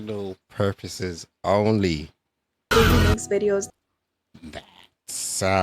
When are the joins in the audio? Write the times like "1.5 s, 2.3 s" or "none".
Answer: 2.7 s